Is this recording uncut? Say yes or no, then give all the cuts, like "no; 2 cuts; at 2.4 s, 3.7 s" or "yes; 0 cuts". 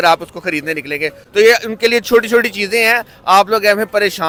yes; 0 cuts